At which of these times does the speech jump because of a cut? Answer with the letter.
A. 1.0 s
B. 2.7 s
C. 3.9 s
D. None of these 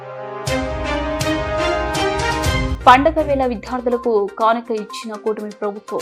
B